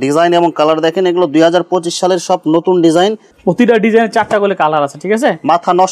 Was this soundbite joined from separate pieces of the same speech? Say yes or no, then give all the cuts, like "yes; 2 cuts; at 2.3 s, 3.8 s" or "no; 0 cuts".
yes; 1 cut; at 3.3 s